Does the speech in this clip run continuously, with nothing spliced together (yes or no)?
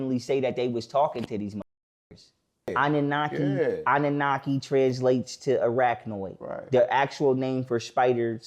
no